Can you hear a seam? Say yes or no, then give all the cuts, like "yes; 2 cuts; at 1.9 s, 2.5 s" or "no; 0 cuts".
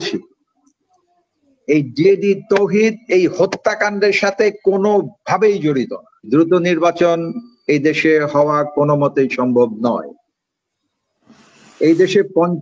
yes; 1 cut; at 6.3 s